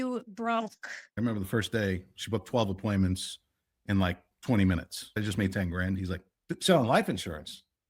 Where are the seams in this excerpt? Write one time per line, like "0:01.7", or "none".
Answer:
0:01.1
0:05.1

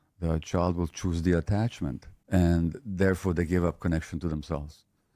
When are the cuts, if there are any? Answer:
0:02.1

